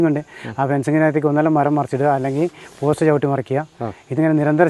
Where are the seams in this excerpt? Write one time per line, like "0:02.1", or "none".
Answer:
none